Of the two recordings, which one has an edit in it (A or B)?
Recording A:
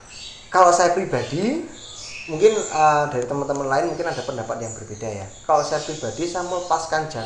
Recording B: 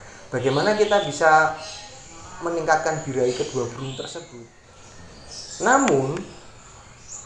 B